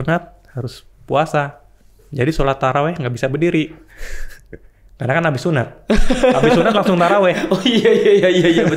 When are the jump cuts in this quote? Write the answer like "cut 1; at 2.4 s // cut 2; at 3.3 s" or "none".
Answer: none